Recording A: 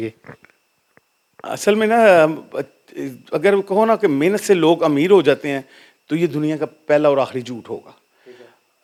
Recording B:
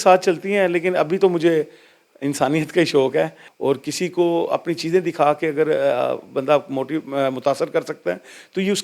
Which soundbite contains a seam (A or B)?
B